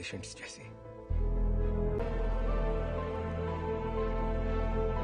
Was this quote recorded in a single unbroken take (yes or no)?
no